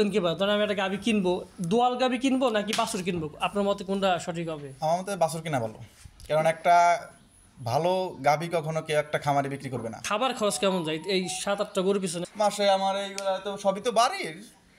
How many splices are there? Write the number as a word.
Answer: two